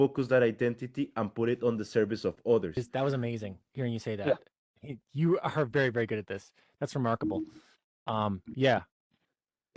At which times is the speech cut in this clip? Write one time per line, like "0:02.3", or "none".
0:02.9